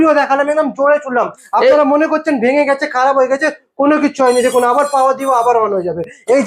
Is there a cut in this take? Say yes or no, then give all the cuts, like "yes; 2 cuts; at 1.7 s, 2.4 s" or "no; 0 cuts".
no; 0 cuts